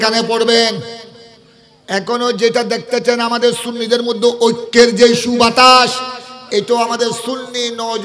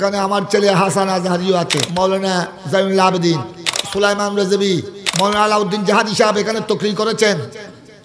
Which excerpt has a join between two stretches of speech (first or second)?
second